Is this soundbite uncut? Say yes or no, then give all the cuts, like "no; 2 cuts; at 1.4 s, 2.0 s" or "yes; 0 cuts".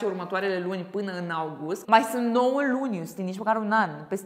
no; 1 cut; at 1.8 s